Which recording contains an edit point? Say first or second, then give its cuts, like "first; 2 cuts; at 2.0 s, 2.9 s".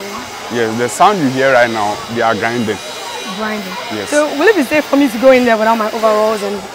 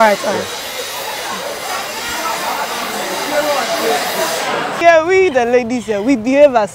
second; 1 cut; at 4.8 s